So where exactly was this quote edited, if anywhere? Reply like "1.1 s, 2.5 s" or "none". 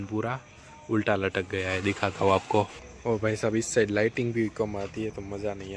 2.9 s